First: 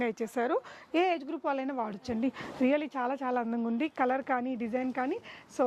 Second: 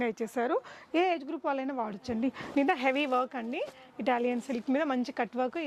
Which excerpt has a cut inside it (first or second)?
second